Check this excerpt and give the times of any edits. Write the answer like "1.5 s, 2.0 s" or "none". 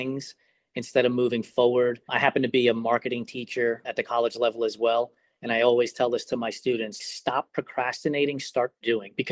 7.0 s